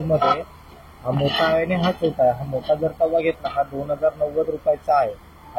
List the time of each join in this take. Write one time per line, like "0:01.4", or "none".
none